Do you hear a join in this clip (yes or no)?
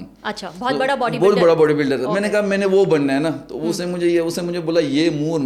no